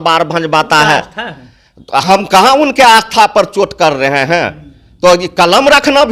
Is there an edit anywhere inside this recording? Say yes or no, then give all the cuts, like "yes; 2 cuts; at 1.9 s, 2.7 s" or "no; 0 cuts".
no; 0 cuts